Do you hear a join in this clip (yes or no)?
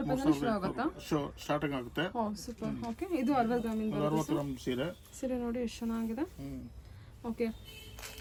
no